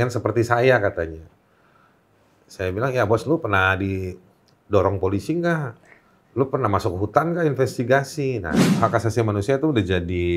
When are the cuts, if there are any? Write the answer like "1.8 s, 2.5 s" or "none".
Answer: 8.5 s